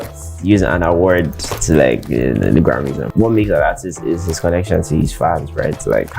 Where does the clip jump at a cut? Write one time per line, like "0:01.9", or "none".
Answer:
0:03.0

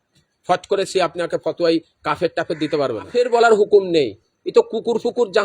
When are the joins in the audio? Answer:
0:03.1

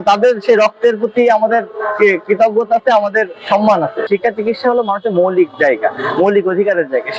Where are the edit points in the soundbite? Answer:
0:04.1

